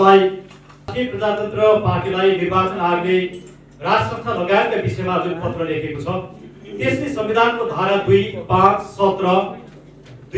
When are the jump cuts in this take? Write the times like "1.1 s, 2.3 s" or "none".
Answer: 0.9 s